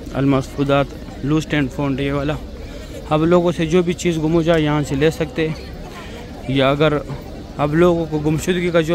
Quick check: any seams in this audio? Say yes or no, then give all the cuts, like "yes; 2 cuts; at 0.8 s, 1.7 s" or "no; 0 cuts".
no; 0 cuts